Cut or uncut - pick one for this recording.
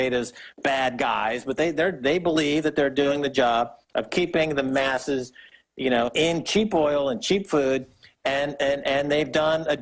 cut